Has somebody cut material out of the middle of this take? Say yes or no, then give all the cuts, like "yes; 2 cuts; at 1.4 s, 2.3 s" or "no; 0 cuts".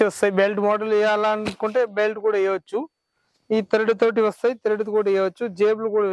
no; 0 cuts